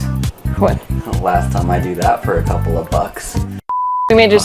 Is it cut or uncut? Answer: cut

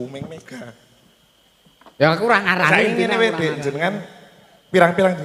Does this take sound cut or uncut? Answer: uncut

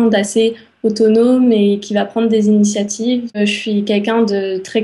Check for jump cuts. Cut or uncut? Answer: cut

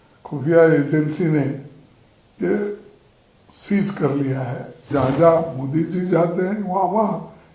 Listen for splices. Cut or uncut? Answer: cut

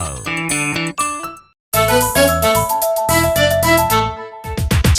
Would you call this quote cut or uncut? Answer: cut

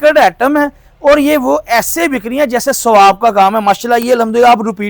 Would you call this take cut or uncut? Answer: uncut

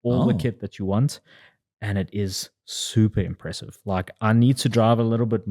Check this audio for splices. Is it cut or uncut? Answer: uncut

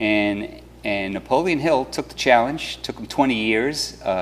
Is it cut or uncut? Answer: cut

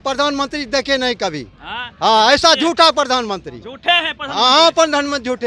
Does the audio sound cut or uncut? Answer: uncut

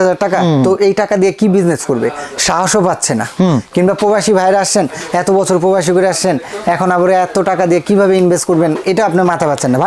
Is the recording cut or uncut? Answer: uncut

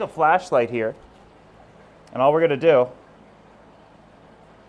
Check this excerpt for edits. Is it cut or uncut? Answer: uncut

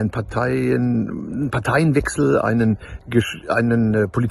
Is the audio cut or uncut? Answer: uncut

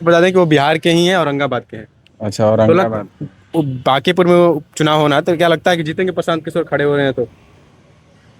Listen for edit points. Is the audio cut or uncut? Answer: uncut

